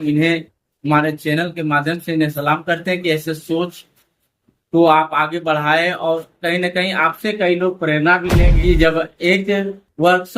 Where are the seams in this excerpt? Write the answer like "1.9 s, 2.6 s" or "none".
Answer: 8.5 s